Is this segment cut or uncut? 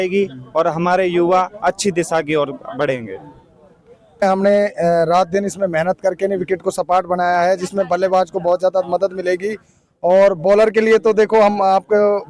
cut